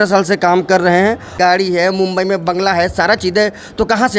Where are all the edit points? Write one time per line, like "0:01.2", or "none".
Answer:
0:01.3